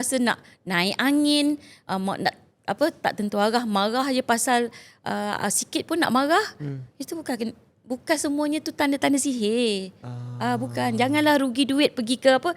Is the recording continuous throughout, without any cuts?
yes; 0 cuts

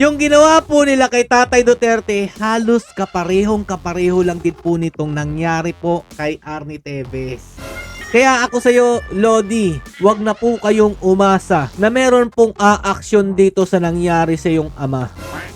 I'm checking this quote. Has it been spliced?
yes; 2 cuts; at 7.9 s, 9.8 s

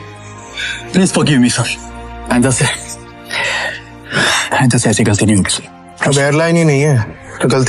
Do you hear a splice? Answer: no; 0 cuts

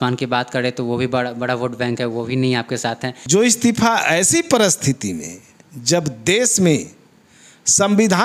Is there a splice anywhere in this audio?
yes; 1 cut; at 3.1 s

